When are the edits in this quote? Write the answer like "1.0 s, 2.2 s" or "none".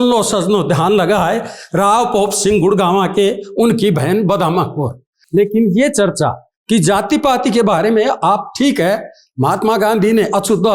5.2 s